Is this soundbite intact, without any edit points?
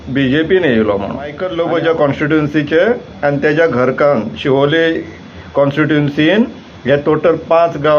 no; 1 cut; at 1.4 s

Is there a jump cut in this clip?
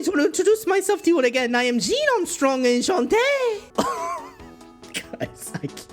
yes; 1 cut; at 3.7 s

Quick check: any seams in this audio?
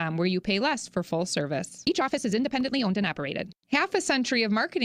yes; 1 cut; at 3.5 s

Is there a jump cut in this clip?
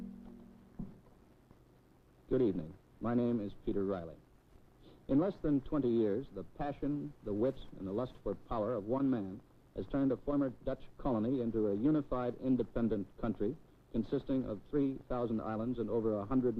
no; 0 cuts

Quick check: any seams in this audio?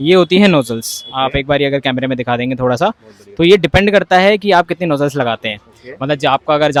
no; 0 cuts

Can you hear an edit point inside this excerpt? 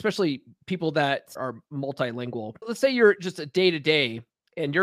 yes; 2 cuts; at 1.3 s, 2.7 s

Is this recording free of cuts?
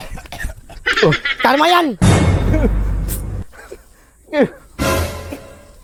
yes; 0 cuts

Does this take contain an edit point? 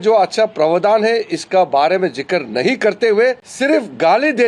yes; 1 cut; at 3.5 s

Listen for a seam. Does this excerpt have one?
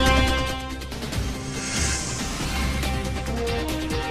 yes; 1 cut; at 1.2 s

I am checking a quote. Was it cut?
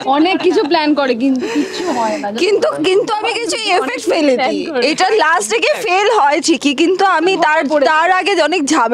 no; 0 cuts

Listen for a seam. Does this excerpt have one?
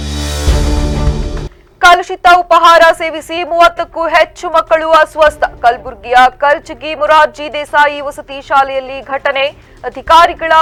no; 0 cuts

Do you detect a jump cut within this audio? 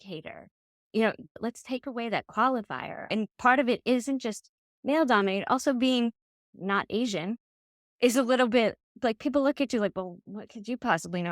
yes; 2 cuts; at 1.4 s, 3.1 s

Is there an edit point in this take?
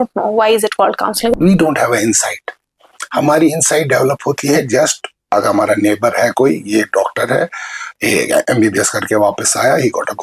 yes; 1 cut; at 1.4 s

